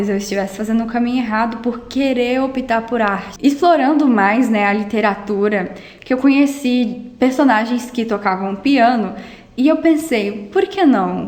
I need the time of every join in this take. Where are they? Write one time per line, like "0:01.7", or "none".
0:03.3